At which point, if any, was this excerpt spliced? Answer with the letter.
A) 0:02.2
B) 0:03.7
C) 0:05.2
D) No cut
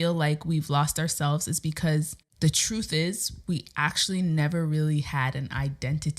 A